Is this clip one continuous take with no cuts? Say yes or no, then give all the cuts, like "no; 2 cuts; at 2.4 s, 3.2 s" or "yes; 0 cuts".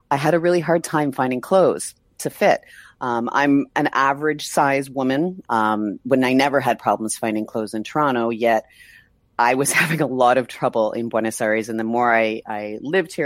no; 1 cut; at 5.4 s